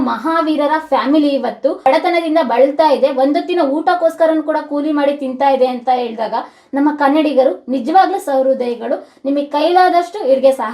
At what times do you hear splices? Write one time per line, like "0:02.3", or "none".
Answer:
none